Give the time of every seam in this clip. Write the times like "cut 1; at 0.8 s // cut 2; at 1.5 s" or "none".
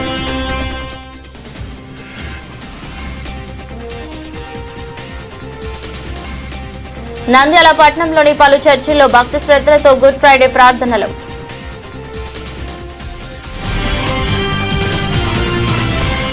cut 1; at 1.9 s // cut 2; at 3.3 s